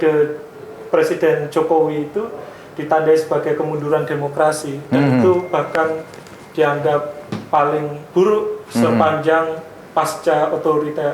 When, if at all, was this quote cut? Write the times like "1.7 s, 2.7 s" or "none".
none